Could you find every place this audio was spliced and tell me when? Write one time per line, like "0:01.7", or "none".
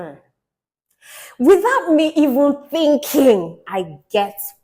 0:03.6